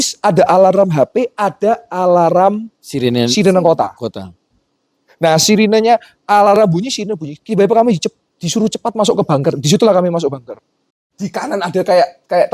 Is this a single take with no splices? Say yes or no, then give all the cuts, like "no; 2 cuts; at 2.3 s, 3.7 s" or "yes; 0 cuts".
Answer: no; 1 cut; at 11.0 s